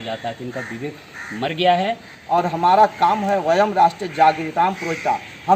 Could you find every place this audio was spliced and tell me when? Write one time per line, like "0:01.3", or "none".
0:02.1